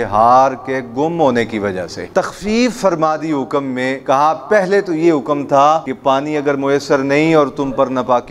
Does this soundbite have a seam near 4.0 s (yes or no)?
yes